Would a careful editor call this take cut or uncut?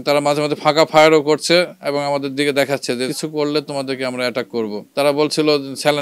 cut